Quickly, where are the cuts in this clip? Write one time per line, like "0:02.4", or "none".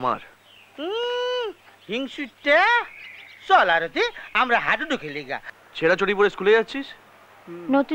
0:05.6